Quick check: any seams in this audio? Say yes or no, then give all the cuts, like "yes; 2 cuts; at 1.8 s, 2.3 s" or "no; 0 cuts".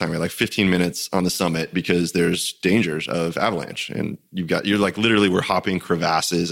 no; 0 cuts